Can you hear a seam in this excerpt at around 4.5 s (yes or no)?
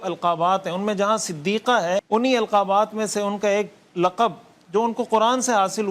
no